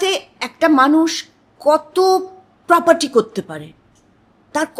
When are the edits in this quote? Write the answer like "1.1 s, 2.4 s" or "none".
none